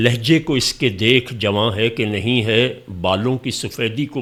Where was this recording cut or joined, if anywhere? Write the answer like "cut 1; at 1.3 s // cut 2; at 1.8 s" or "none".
none